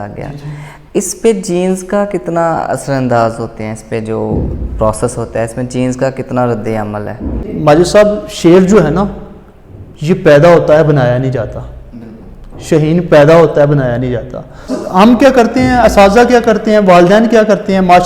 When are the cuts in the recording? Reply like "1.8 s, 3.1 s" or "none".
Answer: 7.5 s, 14.8 s

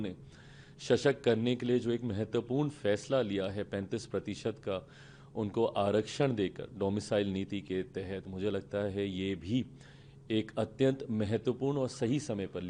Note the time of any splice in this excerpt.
none

